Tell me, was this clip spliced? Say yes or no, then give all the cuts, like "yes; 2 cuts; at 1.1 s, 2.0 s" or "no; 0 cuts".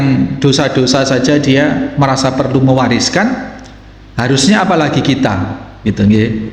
no; 0 cuts